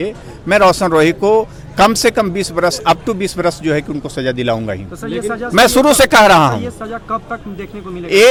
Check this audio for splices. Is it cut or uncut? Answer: uncut